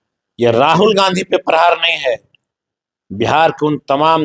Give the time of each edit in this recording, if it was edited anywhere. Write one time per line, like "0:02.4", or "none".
none